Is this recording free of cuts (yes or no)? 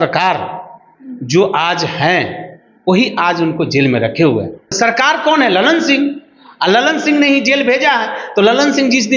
no